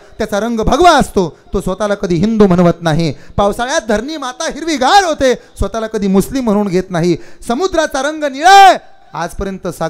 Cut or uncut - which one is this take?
uncut